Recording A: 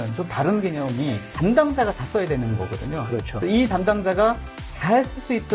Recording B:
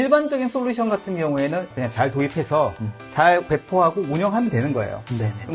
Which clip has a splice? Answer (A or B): B